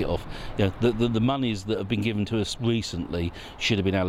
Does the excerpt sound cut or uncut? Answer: uncut